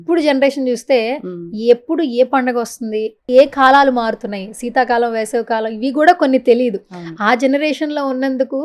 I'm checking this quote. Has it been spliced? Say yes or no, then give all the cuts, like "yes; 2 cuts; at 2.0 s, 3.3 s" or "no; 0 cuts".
no; 0 cuts